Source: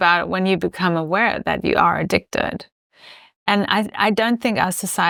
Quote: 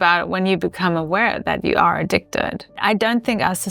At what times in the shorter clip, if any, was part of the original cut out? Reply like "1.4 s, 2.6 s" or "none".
2.8 s